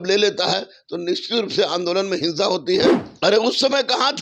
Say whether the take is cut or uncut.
cut